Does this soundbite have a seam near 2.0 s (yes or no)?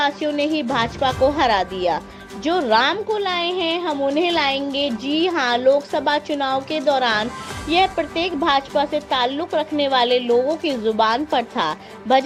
no